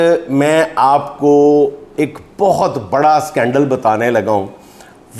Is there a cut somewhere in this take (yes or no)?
no